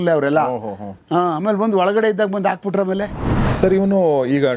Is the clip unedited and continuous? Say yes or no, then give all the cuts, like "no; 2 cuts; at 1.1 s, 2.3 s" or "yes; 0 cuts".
no; 1 cut; at 3.4 s